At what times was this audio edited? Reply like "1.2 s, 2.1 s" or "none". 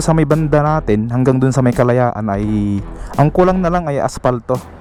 none